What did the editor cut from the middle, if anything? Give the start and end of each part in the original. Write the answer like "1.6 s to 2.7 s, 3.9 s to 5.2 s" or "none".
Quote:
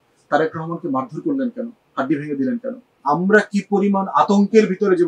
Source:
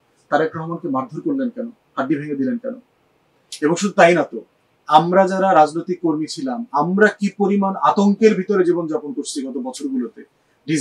2.9 s to 6.6 s